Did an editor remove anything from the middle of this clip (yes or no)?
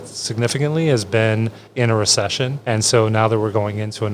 yes